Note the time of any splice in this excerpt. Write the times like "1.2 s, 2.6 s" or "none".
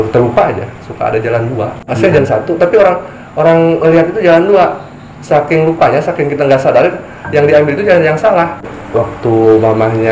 2.2 s, 8.8 s